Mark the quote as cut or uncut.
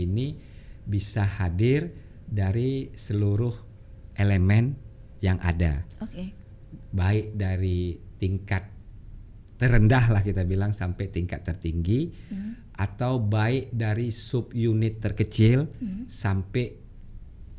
uncut